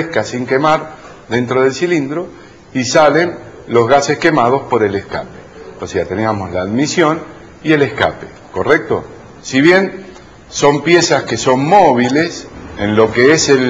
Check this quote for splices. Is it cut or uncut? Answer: cut